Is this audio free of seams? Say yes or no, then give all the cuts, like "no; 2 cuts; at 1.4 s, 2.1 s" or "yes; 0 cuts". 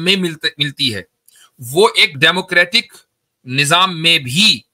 no; 1 cut; at 2.1 s